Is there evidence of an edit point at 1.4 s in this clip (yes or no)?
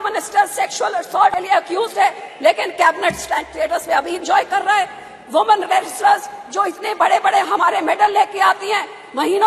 yes